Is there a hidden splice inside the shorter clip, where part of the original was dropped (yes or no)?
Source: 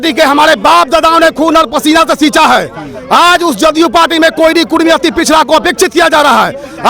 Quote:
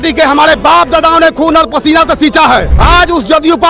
yes